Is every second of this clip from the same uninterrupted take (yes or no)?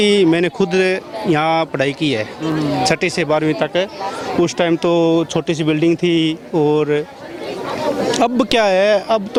yes